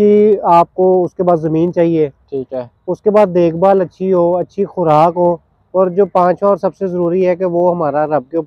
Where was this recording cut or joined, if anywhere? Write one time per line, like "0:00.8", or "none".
none